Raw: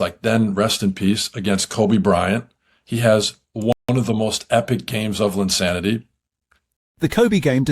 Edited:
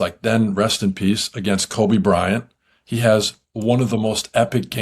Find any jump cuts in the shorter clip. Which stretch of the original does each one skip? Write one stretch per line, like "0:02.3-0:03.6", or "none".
0:03.7-0:03.9